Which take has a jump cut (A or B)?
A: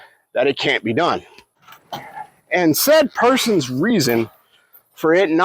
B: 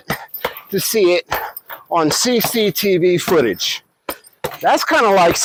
A